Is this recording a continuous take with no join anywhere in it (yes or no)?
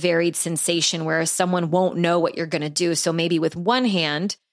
yes